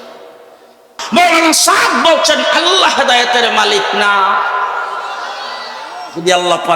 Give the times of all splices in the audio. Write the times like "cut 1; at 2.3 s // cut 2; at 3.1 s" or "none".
cut 1; at 1.1 s